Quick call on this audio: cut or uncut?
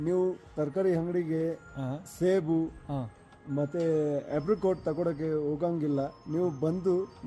uncut